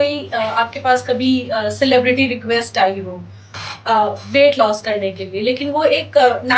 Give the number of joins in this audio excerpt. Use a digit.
0